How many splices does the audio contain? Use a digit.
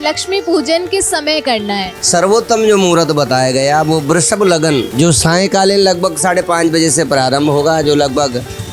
2